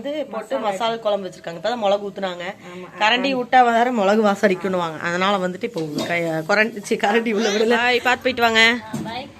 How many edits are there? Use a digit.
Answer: 1